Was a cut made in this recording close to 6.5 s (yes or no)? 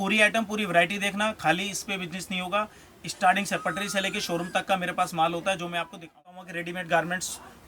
yes